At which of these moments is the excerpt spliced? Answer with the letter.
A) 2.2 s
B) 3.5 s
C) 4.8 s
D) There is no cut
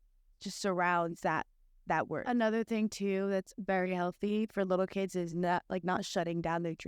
A